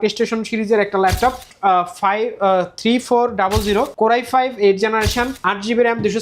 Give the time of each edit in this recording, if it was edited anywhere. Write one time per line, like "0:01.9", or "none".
0:01.5
0:03.9
0:05.4